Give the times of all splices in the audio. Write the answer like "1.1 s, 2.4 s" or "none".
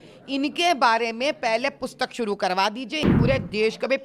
3.1 s